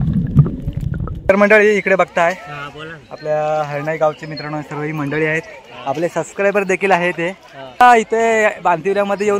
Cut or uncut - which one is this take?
cut